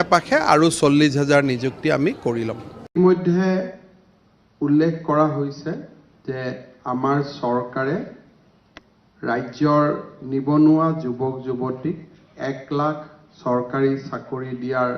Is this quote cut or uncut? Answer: cut